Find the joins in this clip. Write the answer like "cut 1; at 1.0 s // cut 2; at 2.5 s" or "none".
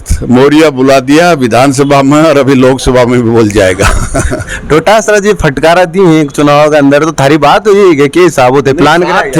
none

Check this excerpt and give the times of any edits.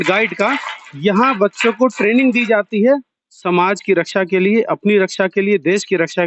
none

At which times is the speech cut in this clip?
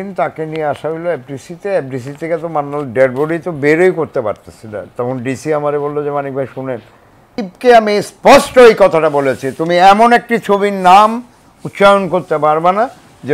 cut 1; at 7.4 s

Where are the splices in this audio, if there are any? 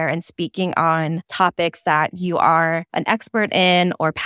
cut 1; at 1.3 s // cut 2; at 2.9 s

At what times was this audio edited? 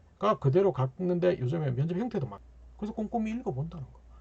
cut 1; at 2.4 s

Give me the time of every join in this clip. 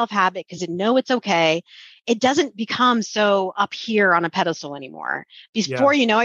none

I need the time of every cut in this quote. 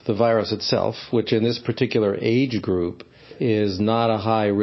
cut 1; at 3.3 s

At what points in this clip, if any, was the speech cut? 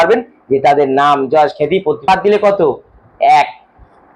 cut 1; at 2.1 s

